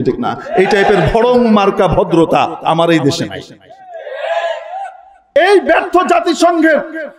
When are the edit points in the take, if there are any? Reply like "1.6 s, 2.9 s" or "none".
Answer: 5.3 s

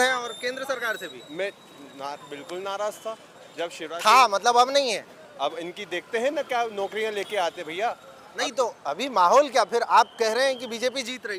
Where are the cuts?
none

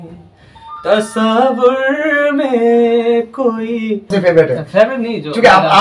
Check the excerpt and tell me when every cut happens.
4.1 s

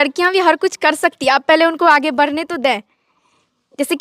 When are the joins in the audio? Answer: none

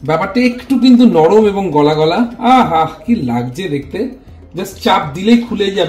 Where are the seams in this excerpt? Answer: none

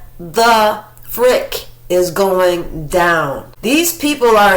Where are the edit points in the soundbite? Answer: 3.4 s

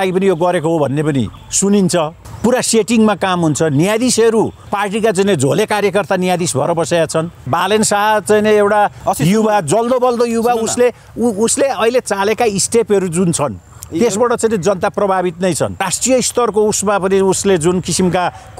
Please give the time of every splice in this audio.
1.4 s, 2.2 s, 4.6 s, 7.5 s, 9.0 s, 15.8 s

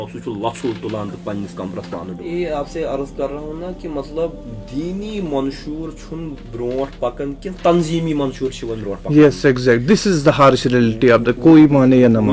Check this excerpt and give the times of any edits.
2.2 s

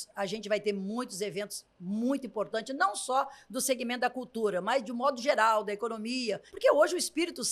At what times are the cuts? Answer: 6.4 s

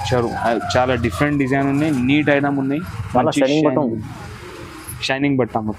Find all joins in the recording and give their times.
none

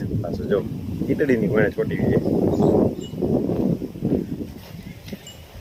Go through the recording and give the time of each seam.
none

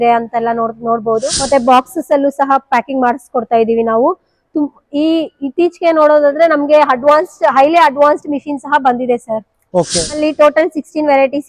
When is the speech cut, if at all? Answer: 1.3 s, 10.2 s

